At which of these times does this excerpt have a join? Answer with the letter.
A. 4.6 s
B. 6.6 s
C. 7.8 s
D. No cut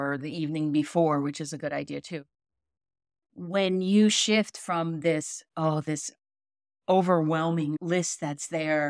C